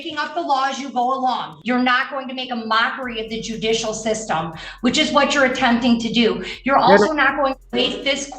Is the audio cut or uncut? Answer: cut